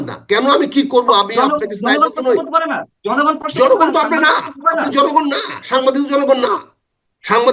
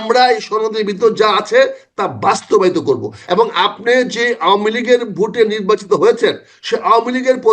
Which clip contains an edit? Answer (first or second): second